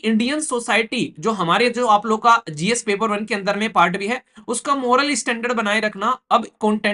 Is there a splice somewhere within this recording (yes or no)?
no